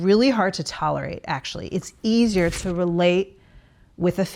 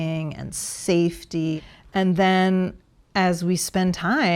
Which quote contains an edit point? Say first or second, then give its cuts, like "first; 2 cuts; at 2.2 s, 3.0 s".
second; 1 cut; at 1.6 s